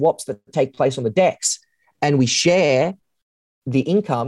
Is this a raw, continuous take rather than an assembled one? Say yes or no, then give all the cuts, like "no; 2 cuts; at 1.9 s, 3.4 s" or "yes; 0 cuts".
yes; 0 cuts